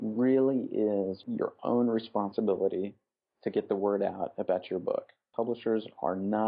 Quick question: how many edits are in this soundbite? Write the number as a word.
one